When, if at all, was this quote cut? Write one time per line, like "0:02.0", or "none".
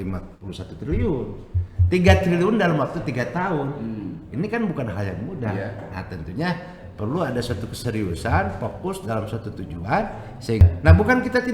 0:10.6